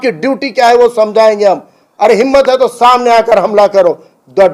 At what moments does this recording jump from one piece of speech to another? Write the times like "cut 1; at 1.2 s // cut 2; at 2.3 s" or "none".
cut 1; at 1.8 s